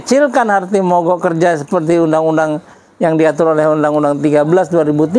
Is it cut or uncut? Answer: uncut